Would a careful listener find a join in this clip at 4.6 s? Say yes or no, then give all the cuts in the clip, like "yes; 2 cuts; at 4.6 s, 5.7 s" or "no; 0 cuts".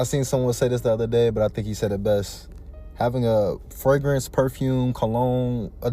no; 0 cuts